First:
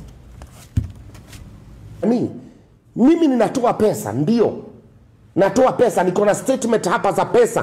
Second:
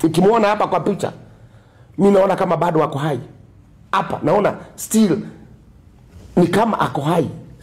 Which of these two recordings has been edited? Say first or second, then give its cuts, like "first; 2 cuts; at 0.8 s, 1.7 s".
first; 1 cut; at 2.0 s